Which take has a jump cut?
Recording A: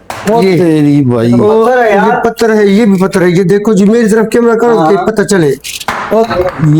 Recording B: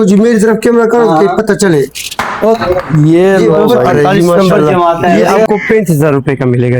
B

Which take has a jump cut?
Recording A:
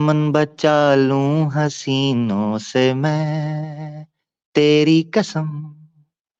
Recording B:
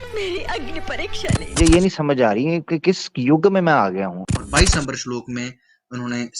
B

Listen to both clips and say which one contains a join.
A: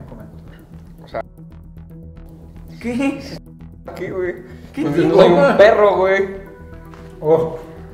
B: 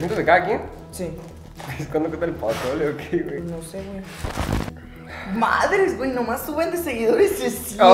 B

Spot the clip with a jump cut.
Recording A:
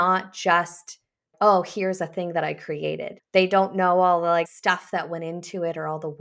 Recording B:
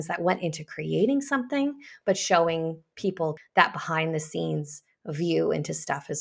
A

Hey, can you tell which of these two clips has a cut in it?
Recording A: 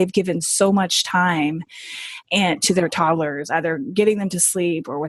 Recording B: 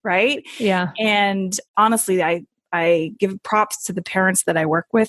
B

